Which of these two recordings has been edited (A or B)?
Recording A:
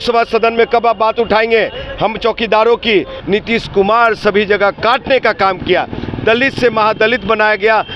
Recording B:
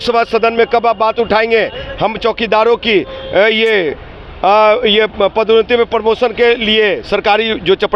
A